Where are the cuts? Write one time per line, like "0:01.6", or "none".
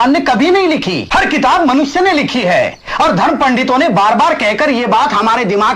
0:01.0